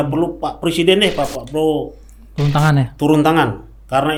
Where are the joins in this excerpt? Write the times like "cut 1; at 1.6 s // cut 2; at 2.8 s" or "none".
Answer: none